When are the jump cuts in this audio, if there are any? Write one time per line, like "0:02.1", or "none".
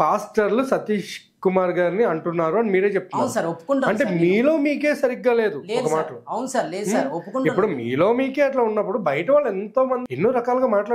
0:10.0